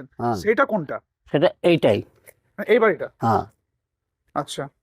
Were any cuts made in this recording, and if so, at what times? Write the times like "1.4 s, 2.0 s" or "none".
none